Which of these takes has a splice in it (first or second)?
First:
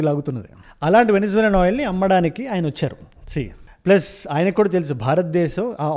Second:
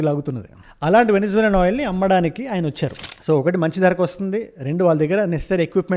second